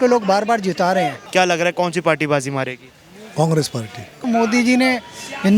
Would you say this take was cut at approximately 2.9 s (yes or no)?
no